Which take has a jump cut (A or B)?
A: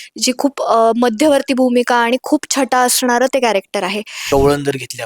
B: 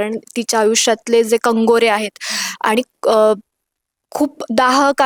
A